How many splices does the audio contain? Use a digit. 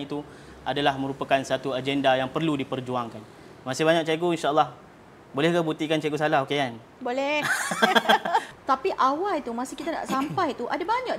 1